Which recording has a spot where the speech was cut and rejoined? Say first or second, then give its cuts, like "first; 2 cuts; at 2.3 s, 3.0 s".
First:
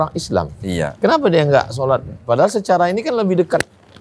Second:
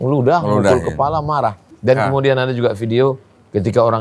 second; 1 cut; at 1.7 s